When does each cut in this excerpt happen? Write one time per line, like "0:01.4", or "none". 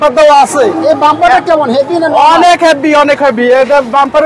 none

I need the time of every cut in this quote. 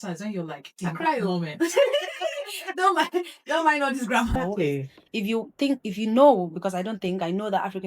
0:04.3

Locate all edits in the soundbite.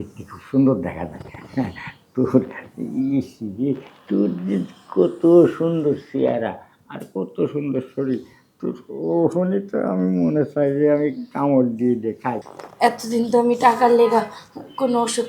0:12.6

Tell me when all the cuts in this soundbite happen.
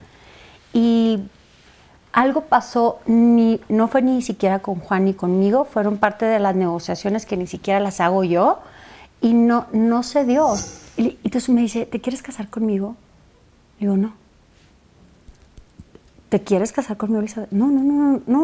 0:10.6

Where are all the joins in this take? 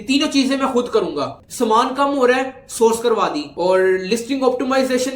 0:01.4

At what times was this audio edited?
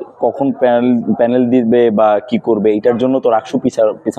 none

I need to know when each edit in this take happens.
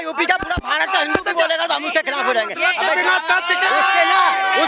none

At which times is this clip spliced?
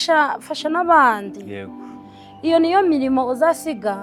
none

